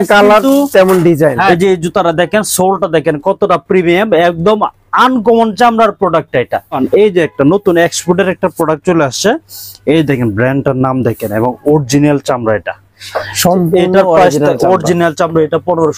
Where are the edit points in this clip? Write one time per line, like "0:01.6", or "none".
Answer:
0:01.5
0:06.8
0:13.2